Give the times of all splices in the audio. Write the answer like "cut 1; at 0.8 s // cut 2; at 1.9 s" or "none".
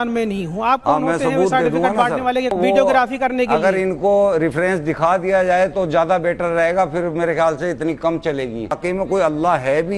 cut 1; at 2.5 s // cut 2; at 8.7 s